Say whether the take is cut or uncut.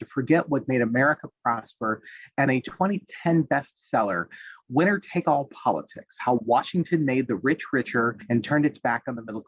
cut